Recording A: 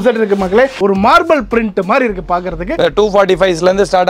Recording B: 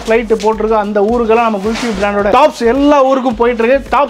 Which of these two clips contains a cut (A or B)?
A